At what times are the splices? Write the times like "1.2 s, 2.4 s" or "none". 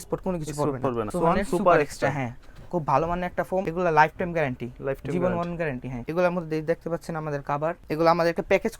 1.1 s, 3.7 s, 6.0 s, 7.8 s